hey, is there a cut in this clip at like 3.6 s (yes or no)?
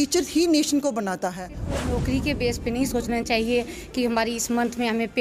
no